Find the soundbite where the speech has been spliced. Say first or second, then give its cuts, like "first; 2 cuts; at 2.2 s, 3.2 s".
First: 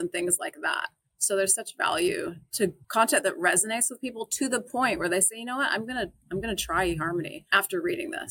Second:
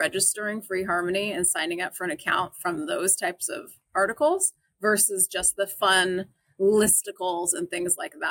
first; 2 cuts; at 2.8 s, 7.4 s